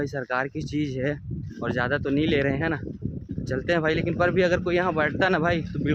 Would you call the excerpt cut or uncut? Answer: uncut